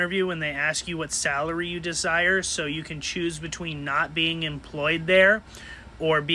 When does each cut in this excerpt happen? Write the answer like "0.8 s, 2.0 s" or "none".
none